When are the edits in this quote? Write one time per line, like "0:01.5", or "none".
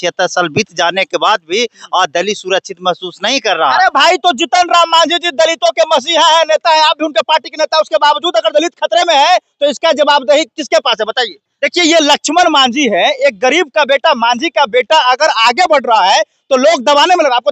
0:11.4